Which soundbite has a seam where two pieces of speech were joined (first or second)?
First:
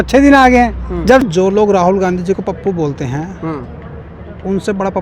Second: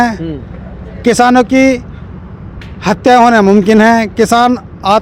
first